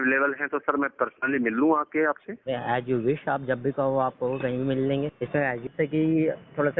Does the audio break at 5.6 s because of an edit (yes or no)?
yes